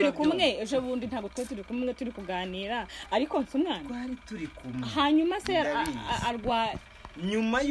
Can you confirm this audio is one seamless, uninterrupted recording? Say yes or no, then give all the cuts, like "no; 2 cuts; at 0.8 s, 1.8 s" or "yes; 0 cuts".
yes; 0 cuts